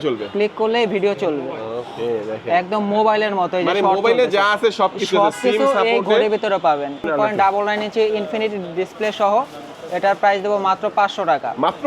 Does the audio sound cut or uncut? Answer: cut